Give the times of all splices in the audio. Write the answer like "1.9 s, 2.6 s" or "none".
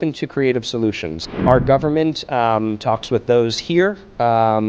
1.4 s